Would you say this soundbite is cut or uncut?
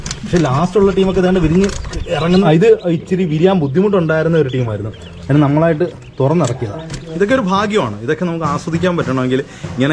cut